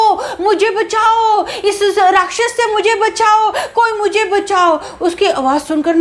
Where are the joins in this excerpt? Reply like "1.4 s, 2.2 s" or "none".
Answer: none